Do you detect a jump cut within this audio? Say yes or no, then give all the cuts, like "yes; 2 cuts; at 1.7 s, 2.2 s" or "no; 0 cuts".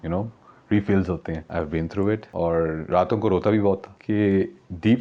yes; 3 cuts; at 1.4 s, 2.3 s, 3.9 s